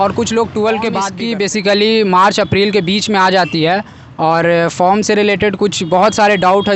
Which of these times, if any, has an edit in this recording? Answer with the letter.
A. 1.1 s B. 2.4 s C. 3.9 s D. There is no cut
A